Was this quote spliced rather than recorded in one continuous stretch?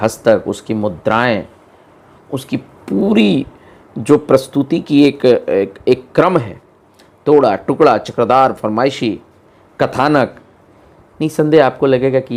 no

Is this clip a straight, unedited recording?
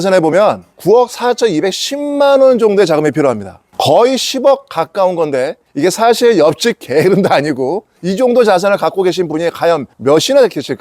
no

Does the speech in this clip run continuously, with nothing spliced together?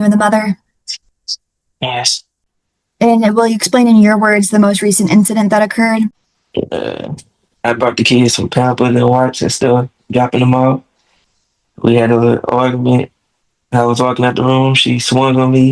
no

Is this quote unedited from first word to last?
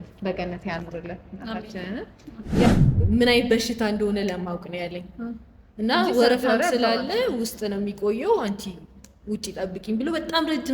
no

